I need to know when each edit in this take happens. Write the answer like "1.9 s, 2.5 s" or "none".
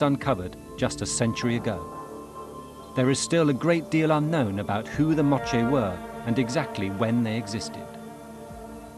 none